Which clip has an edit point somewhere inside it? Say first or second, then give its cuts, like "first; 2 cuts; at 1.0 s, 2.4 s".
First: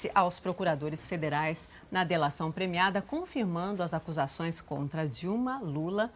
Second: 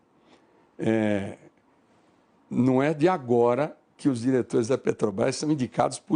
second; 1 cut; at 1.3 s